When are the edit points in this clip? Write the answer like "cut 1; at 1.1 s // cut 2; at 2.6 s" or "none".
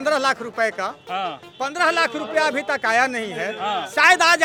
none